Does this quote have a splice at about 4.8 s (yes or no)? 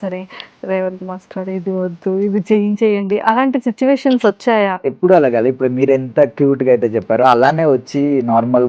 yes